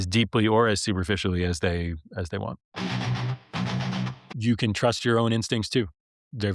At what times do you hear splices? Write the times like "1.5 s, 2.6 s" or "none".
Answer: 2.6 s, 4.2 s